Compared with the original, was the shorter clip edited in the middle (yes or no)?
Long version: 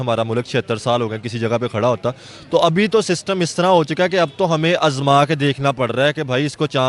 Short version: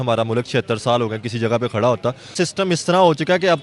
yes